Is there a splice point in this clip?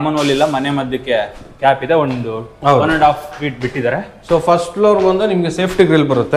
no; 0 cuts

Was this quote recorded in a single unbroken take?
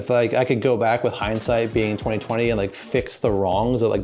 yes; 0 cuts

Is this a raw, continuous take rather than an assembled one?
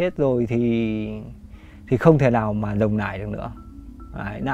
yes; 0 cuts

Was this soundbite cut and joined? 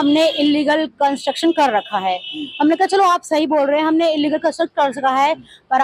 no; 0 cuts

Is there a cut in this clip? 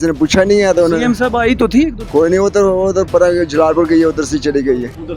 yes; 1 cut; at 2.0 s

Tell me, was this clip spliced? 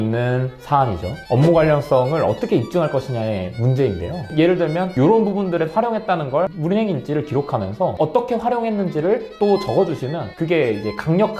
yes; 2 cuts; at 4.2 s, 6.6 s

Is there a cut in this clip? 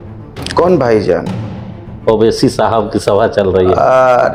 no; 0 cuts

